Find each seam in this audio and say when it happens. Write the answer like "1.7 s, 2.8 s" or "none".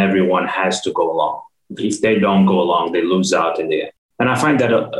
4.0 s